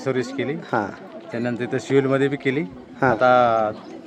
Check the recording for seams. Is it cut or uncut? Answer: uncut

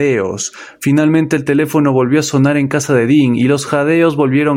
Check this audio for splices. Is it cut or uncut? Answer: uncut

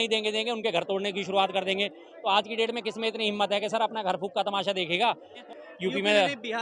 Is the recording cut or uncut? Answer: cut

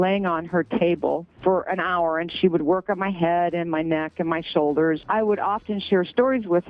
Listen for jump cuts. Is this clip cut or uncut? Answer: cut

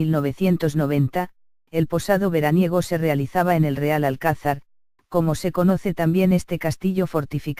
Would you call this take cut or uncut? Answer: uncut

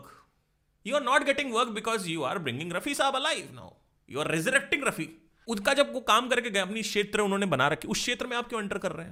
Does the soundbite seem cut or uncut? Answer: uncut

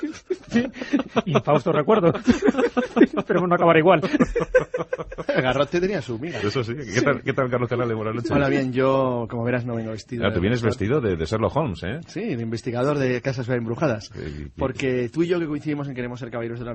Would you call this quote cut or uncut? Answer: uncut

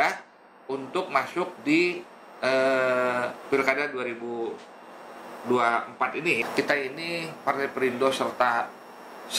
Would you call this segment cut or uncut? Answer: cut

